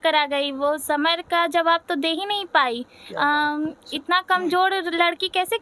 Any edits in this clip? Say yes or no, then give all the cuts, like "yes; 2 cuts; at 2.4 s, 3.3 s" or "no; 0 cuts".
no; 0 cuts